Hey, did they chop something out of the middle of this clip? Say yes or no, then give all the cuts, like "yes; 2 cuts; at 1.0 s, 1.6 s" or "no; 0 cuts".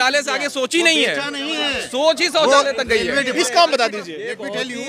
yes; 1 cut; at 3.3 s